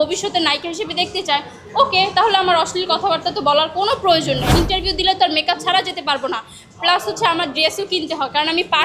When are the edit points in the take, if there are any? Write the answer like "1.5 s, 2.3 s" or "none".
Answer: 4.5 s

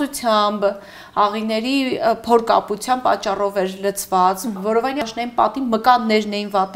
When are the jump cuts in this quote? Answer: 5.0 s

